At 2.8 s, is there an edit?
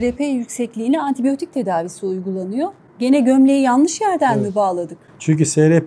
yes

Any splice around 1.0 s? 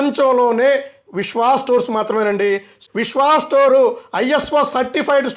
no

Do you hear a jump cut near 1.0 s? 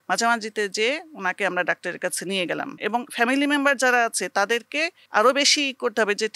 no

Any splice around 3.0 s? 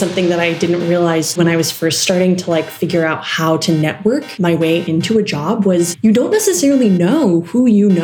no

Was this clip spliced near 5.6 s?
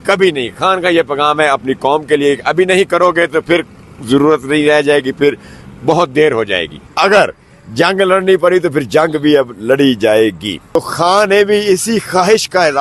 no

